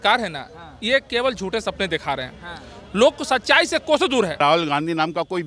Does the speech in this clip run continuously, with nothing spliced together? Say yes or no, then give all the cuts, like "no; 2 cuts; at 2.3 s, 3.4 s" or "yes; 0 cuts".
no; 1 cut; at 4.4 s